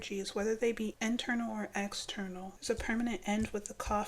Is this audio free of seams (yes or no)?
no